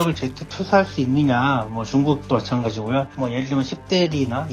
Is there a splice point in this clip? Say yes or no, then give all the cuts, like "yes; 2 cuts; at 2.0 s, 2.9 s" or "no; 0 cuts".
yes; 1 cut; at 3.1 s